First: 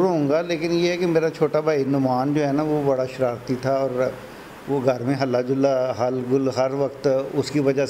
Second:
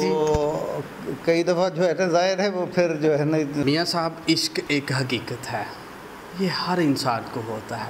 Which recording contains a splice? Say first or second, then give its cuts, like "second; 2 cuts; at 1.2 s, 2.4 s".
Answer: second; 1 cut; at 3.6 s